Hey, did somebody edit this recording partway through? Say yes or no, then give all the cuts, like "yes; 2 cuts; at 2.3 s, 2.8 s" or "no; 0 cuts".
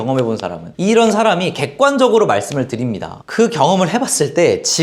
no; 0 cuts